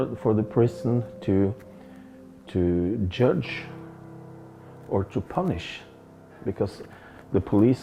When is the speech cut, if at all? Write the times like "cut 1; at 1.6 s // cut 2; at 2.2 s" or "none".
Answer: none